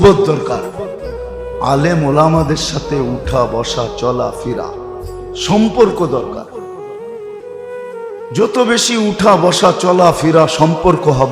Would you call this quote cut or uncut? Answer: cut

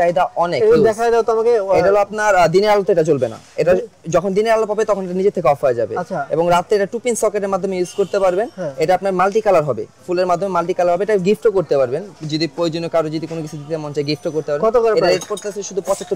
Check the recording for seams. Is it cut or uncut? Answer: uncut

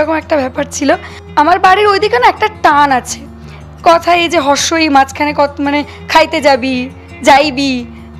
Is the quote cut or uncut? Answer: cut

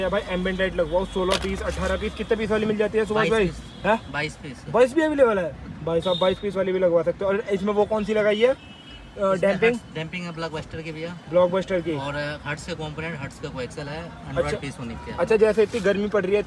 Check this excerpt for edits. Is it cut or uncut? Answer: uncut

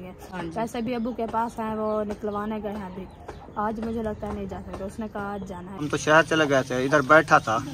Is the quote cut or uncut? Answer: cut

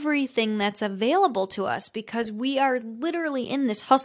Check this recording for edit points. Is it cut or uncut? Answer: uncut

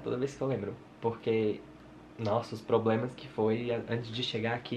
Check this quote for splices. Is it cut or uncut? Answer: uncut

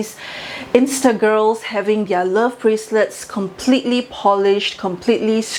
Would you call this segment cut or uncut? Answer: uncut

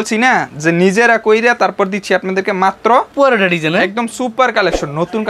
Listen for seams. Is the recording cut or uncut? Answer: cut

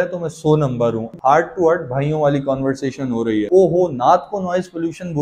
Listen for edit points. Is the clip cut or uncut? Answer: cut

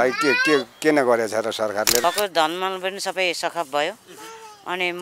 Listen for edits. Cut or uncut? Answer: cut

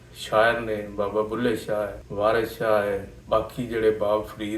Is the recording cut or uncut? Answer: cut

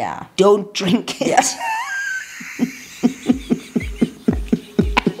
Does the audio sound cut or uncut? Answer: cut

